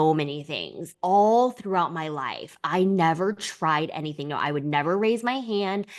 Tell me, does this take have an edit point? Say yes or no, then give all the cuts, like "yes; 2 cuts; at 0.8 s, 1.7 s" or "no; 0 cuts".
yes; 1 cut; at 0.9 s